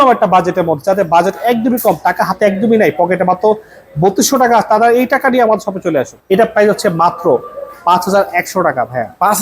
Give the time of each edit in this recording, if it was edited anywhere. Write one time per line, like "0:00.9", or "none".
0:06.1

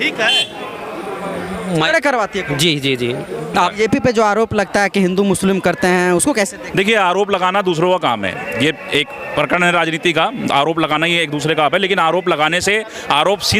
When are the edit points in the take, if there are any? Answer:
0:03.7

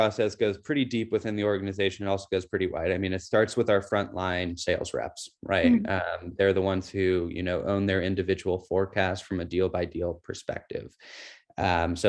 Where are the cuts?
none

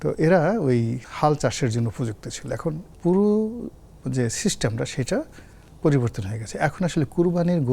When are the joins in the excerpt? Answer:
0:01.0
0:02.9

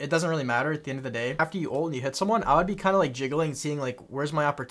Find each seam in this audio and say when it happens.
0:01.4

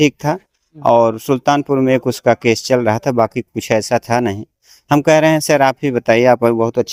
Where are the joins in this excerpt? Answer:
none

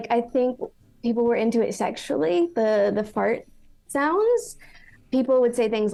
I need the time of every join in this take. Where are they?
none

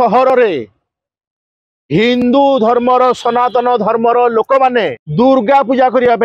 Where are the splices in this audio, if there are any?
0:05.0

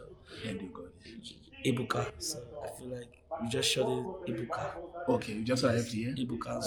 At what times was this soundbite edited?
none

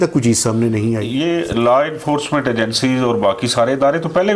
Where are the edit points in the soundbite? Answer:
0:01.1

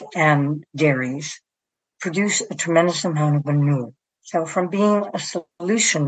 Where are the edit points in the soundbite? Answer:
none

